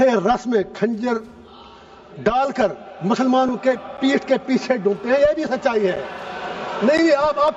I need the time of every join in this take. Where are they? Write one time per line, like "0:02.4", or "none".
none